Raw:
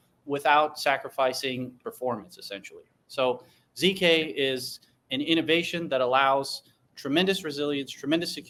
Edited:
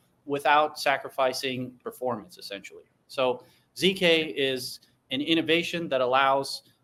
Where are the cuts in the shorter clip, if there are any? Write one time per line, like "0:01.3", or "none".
none